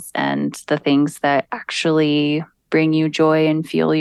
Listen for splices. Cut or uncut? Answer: uncut